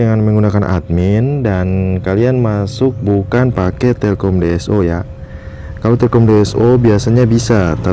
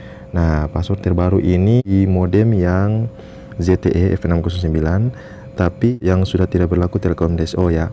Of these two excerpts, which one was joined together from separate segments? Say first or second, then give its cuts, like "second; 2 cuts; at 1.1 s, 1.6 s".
second; 2 cuts; at 1.9 s, 5.9 s